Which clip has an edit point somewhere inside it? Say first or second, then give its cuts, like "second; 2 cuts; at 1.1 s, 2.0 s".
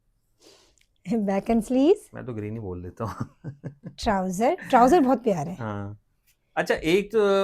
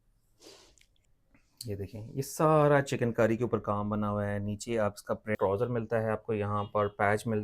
second; 2 cuts; at 0.9 s, 5.4 s